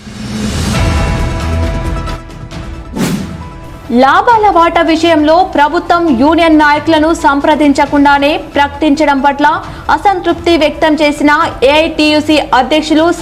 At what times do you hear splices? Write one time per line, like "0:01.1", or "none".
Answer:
0:02.3
0:03.4